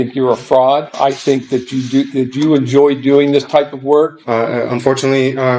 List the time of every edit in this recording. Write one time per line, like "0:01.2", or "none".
0:01.0
0:04.2